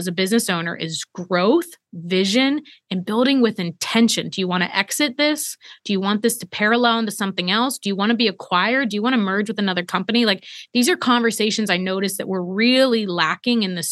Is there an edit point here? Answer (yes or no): no